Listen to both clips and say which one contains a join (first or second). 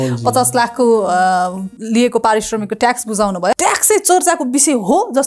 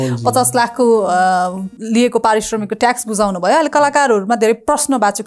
first